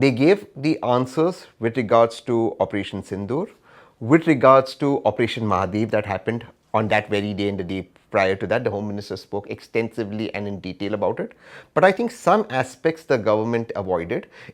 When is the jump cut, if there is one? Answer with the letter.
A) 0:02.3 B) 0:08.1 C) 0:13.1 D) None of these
D